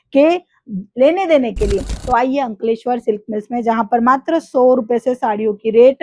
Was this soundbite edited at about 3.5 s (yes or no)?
no